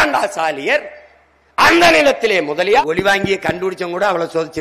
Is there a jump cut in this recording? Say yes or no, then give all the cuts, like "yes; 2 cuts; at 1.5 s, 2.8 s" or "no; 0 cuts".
yes; 1 cut; at 2.8 s